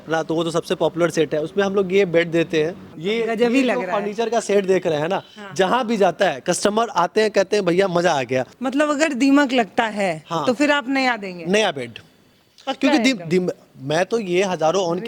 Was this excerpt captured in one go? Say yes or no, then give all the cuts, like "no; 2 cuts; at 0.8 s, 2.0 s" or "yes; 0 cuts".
no; 2 cuts; at 2.9 s, 8.5 s